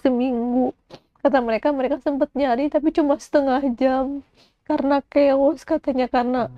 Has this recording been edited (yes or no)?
no